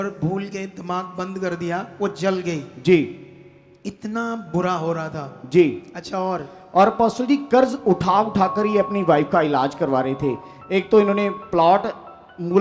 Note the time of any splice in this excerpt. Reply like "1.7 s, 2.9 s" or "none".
none